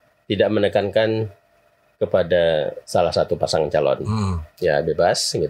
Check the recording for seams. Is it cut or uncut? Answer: uncut